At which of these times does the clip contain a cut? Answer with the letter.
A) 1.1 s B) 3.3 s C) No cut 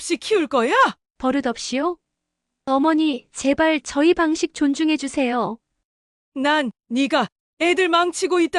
C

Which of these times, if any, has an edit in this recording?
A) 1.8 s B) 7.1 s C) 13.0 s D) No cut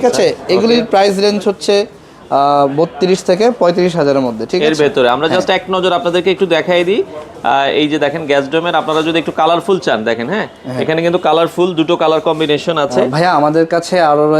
C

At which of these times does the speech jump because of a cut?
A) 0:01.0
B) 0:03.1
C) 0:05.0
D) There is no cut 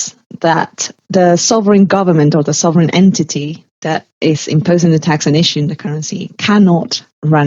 A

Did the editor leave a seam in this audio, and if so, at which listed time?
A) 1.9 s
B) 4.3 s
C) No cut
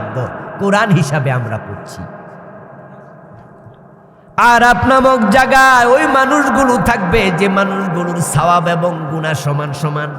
B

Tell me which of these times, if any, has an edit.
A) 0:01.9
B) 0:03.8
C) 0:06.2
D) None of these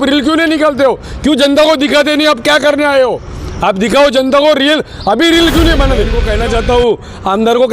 C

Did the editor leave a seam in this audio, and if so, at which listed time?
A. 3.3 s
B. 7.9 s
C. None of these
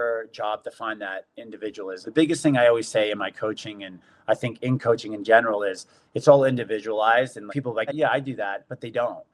B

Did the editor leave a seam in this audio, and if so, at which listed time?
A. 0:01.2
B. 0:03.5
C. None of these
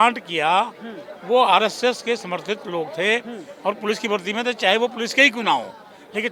C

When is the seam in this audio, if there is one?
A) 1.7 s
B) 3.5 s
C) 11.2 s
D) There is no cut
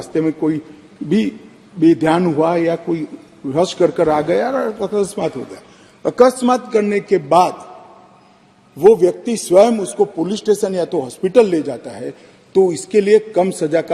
D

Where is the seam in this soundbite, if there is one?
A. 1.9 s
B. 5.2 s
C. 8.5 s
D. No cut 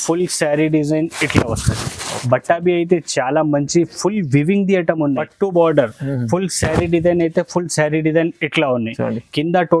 B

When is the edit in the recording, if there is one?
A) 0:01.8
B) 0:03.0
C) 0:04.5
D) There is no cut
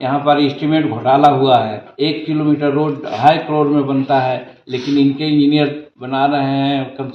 A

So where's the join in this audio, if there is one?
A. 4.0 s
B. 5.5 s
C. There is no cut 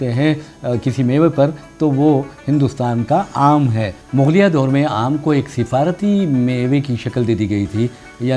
A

